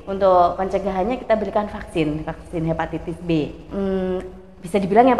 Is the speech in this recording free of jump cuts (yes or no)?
no